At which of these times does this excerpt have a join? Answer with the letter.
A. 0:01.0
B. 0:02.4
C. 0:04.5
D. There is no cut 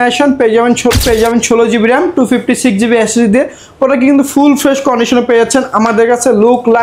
A